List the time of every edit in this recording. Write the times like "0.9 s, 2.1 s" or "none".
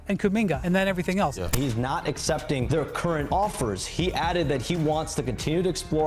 1.5 s